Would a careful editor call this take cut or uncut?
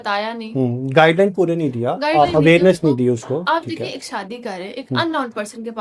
uncut